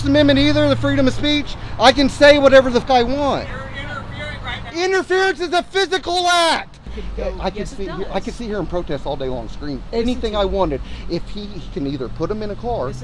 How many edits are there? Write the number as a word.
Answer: two